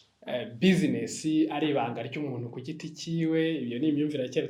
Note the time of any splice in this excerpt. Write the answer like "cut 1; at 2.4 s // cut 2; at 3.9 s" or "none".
none

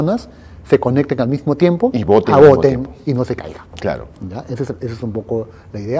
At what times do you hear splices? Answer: none

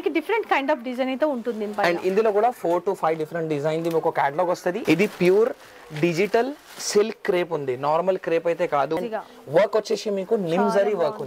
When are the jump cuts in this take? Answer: cut 1; at 4.8 s // cut 2; at 9.0 s

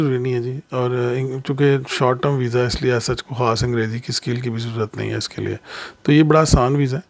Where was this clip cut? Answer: none

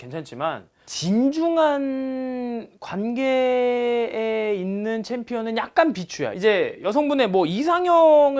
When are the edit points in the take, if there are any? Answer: cut 1; at 6.3 s

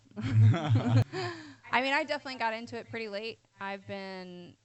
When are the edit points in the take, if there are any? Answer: cut 1; at 1.1 s

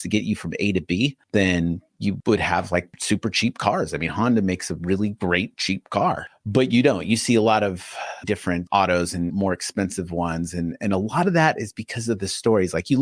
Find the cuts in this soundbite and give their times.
cut 1; at 6.3 s // cut 2; at 8.2 s

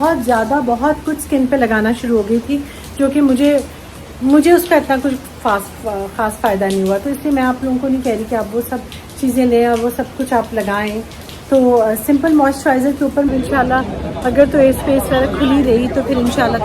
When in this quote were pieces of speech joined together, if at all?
cut 1; at 13.3 s

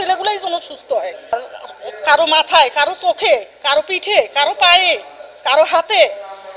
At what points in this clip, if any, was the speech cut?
none

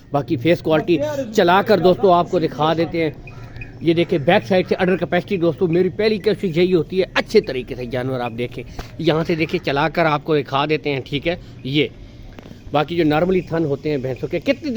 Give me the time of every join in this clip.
none

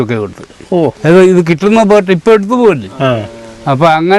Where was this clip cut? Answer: cut 1; at 1.0 s

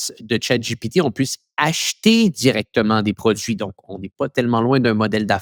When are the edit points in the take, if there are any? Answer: none

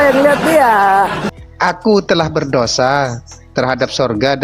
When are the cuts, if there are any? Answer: cut 1; at 1.2 s

